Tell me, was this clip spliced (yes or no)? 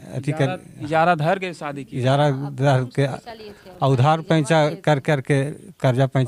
no